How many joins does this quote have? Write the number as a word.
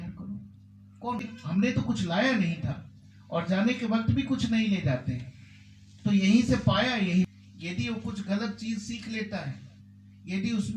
two